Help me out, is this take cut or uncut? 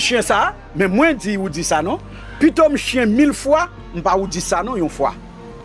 uncut